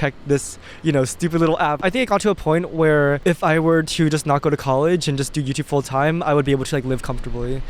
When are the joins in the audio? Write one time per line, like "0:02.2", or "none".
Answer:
0:01.8
0:03.2